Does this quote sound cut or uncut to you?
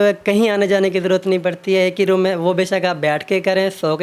uncut